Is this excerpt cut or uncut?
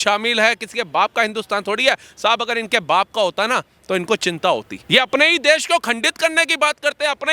uncut